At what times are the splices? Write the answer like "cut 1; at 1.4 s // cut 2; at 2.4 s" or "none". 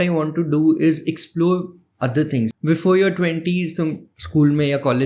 cut 1; at 2.5 s